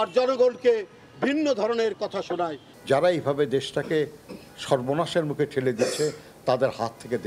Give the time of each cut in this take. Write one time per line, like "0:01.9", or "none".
none